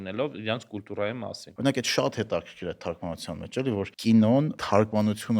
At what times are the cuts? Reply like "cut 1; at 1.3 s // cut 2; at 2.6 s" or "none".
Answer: cut 1; at 1.4 s // cut 2; at 3.9 s // cut 3; at 4.6 s

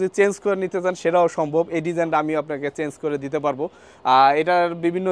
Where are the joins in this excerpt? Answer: none

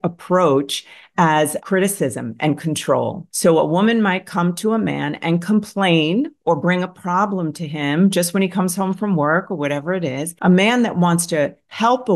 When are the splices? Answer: cut 1; at 3.2 s // cut 2; at 10.3 s

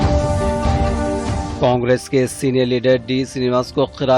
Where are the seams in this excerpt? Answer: cut 1; at 1.5 s

